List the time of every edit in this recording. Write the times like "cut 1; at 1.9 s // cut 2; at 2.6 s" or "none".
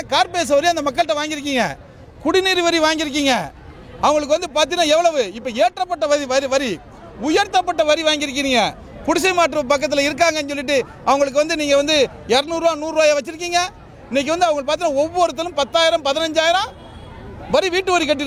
none